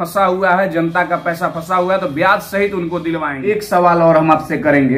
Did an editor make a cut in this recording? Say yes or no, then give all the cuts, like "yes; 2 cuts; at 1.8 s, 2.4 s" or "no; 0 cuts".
no; 0 cuts